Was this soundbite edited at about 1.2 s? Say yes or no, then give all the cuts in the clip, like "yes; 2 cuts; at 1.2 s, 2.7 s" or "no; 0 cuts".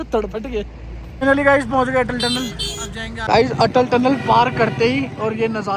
yes; 2 cuts; at 1.2 s, 3.2 s